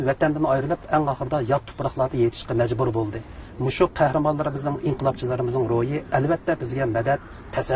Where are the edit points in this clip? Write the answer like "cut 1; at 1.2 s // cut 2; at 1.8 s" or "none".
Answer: cut 1; at 3.5 s